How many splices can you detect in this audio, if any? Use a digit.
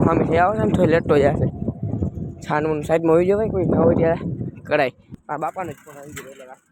1